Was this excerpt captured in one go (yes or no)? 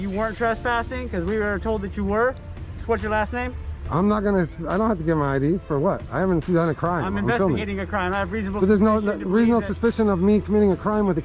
yes